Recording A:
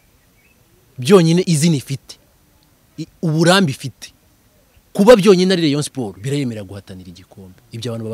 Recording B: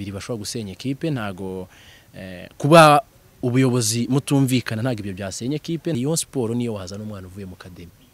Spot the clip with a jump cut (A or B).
B